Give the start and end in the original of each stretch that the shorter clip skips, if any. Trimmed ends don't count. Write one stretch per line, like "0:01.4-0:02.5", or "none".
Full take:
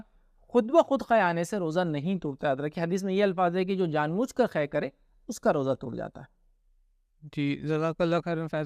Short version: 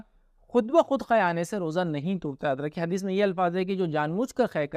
none